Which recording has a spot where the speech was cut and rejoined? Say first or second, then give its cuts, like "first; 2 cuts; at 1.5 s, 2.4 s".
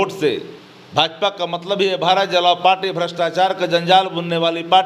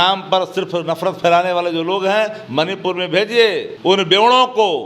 second; 1 cut; at 3.7 s